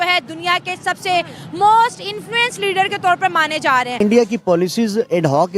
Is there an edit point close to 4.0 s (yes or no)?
yes